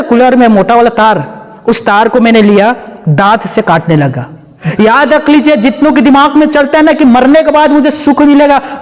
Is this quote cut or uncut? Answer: cut